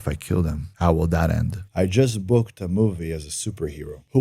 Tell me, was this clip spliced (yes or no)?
yes